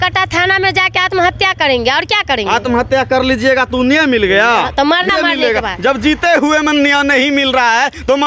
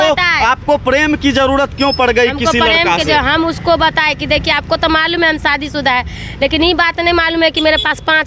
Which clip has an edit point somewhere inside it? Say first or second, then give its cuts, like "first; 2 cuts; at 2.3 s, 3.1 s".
first; 1 cut; at 5.1 s